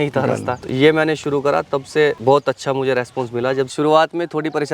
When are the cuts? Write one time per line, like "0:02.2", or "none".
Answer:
0:02.2
0:03.7